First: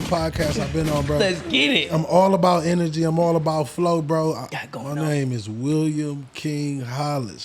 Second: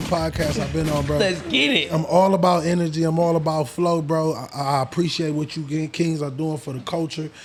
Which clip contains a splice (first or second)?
first